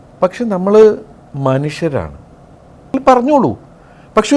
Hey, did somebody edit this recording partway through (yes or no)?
yes